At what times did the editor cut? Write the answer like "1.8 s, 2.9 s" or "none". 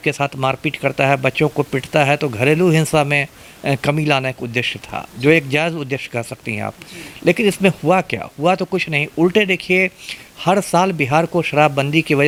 none